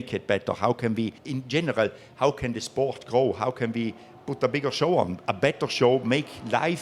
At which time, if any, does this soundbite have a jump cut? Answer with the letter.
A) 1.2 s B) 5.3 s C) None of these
A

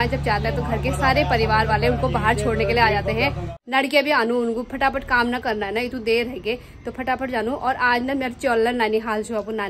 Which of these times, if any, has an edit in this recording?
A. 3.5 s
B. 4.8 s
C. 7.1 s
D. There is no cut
A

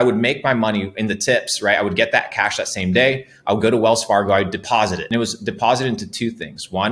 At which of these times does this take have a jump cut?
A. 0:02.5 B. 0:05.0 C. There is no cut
B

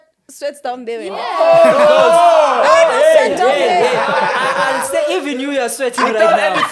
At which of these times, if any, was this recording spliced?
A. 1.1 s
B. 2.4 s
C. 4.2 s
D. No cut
A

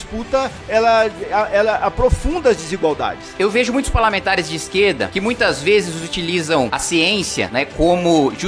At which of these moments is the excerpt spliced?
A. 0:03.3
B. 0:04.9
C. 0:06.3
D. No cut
A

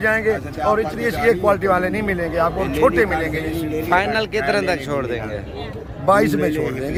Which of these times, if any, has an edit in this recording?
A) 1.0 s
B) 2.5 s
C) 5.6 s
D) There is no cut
D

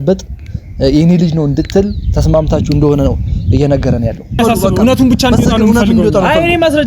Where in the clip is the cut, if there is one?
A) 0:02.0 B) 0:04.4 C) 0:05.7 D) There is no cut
B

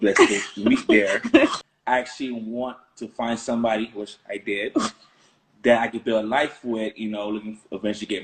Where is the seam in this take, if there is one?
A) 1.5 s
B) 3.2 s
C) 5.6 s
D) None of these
A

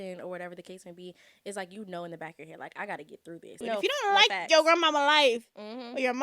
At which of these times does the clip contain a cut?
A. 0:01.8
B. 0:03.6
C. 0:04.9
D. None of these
B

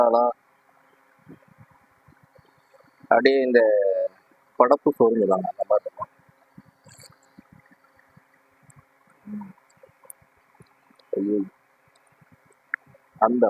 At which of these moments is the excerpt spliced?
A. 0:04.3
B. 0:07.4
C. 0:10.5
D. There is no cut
D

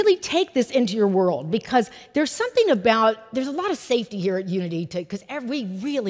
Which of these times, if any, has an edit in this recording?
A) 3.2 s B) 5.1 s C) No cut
C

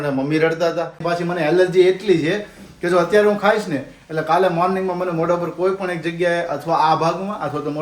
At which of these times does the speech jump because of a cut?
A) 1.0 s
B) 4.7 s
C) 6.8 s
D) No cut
A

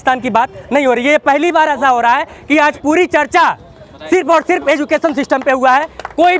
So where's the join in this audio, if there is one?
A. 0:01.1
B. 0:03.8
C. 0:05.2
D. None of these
D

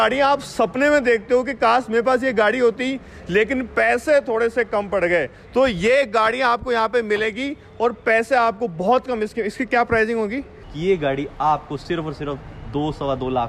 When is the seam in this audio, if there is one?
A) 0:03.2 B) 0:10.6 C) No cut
B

